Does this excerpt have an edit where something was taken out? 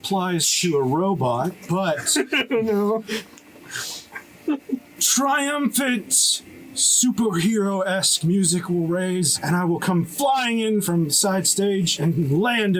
yes; 3 cuts; at 9.4 s, 10.8 s, 11.9 s

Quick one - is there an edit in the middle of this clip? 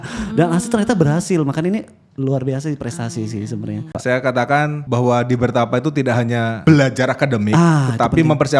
yes; 3 cuts; at 3.9 s, 4.8 s, 6.6 s

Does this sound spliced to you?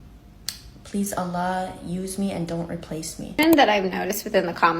yes; 1 cut; at 3.3 s

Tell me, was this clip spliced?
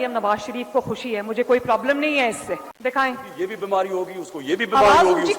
yes; 1 cut; at 2.6 s

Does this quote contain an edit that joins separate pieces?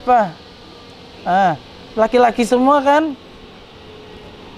no; 0 cuts

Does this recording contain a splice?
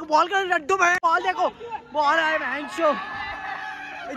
no; 0 cuts

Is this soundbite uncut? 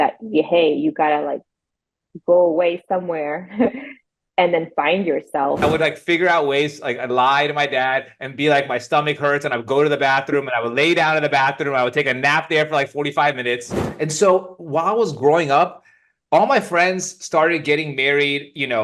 no; 2 cuts; at 5.6 s, 13.8 s

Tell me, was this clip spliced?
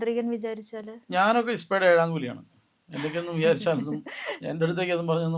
no; 0 cuts

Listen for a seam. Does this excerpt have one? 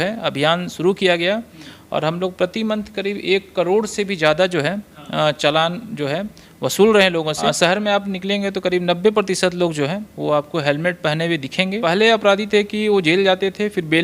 yes; 2 cuts; at 7.4 s, 11.8 s

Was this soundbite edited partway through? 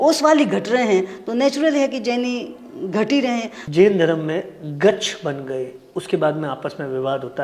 yes; 1 cut; at 3.6 s

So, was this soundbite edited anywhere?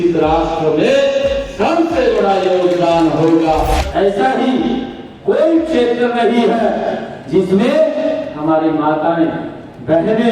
yes; 1 cut; at 3.9 s

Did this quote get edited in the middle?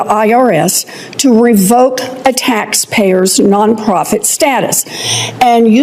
no; 0 cuts

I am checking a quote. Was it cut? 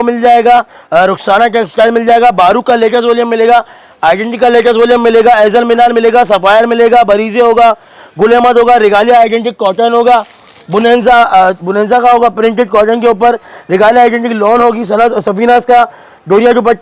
no; 0 cuts

